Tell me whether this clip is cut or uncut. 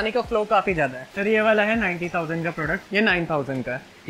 cut